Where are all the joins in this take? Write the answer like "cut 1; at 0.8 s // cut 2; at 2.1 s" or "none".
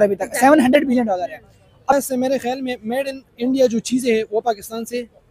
cut 1; at 1.9 s